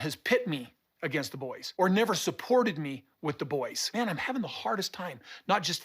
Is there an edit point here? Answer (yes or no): no